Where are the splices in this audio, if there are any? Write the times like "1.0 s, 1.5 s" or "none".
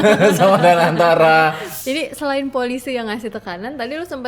1.7 s